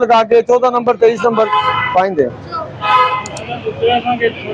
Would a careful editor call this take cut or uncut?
uncut